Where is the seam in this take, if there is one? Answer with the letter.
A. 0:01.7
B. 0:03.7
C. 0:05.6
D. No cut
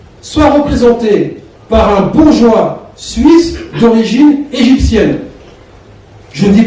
D